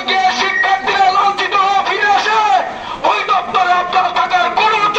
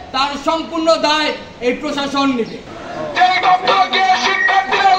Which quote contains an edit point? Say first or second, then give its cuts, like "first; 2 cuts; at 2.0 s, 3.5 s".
second; 1 cut; at 2.6 s